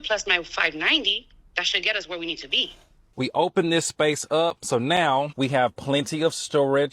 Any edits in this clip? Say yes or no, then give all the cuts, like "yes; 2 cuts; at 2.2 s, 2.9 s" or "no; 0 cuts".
yes; 1 cut; at 3.1 s